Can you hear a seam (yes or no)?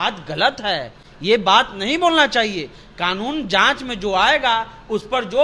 no